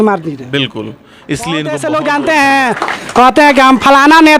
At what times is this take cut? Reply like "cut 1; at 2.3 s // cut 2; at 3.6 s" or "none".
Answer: cut 1; at 1.7 s